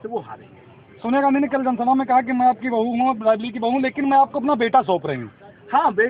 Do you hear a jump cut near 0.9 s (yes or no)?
no